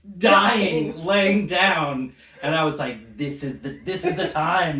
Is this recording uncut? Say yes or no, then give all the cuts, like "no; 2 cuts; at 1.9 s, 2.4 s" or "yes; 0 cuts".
yes; 0 cuts